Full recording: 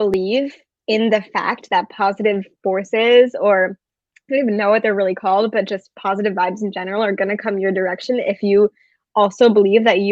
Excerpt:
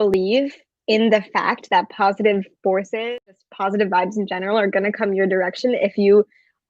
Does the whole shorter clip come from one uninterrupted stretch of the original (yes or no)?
no